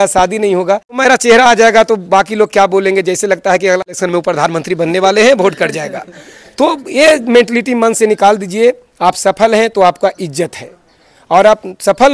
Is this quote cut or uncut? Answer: cut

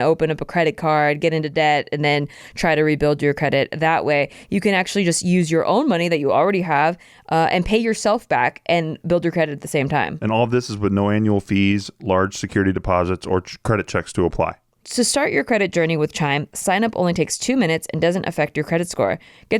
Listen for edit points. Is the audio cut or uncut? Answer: cut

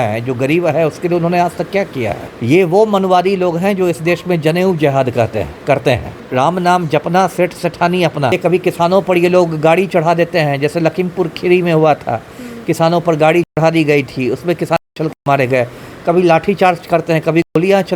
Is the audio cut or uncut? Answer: cut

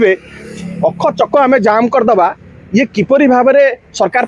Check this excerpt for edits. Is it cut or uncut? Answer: uncut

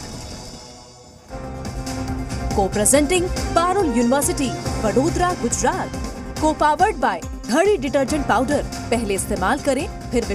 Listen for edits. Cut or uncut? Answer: cut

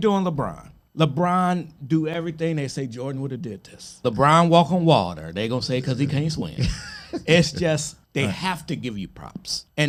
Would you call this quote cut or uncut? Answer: uncut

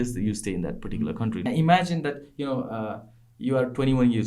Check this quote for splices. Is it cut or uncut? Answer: cut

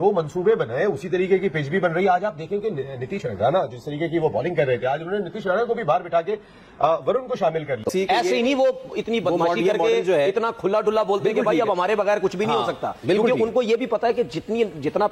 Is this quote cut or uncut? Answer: cut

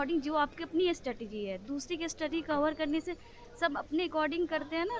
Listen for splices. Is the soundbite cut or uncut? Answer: uncut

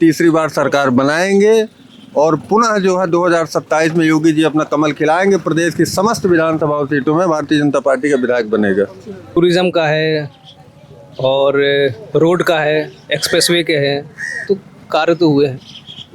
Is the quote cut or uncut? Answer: cut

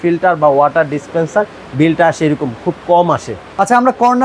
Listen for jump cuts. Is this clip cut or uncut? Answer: uncut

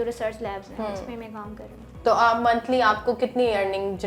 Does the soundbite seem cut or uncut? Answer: uncut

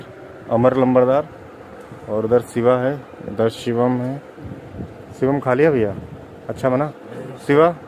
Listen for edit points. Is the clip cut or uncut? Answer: uncut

